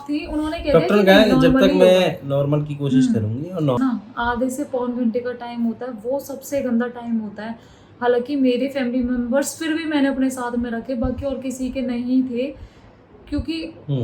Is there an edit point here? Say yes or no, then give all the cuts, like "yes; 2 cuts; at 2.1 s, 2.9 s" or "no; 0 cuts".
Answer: yes; 1 cut; at 3.8 s